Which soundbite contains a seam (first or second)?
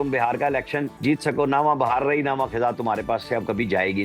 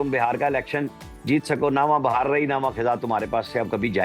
first